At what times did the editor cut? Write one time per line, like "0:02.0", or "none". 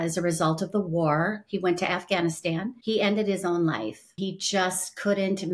0:02.7
0:04.2

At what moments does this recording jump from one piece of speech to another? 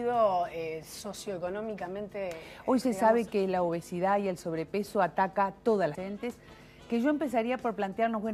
none

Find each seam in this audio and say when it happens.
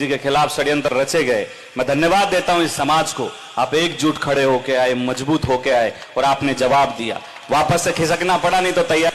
none

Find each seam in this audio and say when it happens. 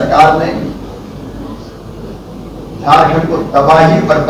none

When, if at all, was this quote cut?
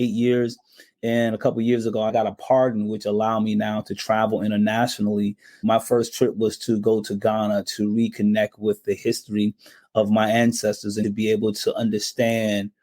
0:02.1
0:05.6
0:11.0

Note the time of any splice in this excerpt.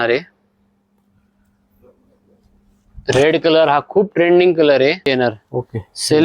0:05.1

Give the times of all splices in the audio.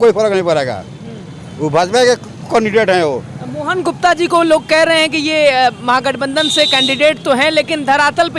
none

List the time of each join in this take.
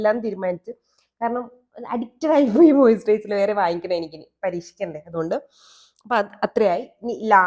none

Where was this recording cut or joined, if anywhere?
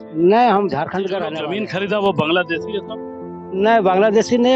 0:01.3

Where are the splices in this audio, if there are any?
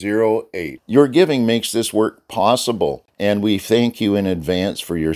0:03.1

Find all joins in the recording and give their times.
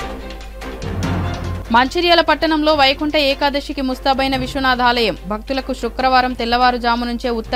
0:01.3

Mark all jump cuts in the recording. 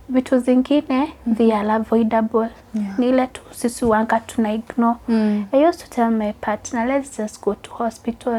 none

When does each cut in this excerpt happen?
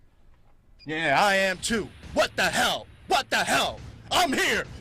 none

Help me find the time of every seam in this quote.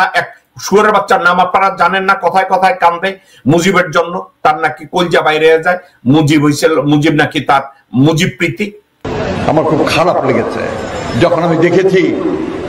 none

